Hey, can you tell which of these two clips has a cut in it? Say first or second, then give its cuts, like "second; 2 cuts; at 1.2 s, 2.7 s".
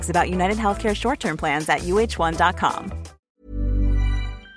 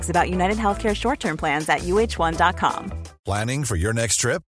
first; 1 cut; at 3.2 s